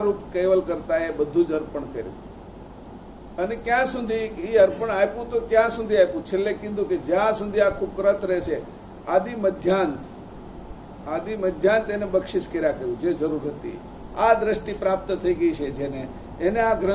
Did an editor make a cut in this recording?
yes; 1 cut; at 14.0 s

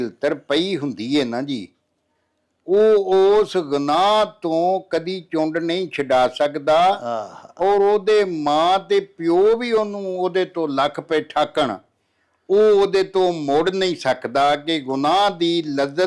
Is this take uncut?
yes; 0 cuts

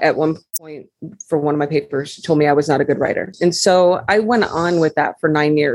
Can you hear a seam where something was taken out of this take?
yes; 1 cut; at 3.3 s

